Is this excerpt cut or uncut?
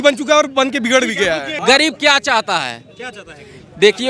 cut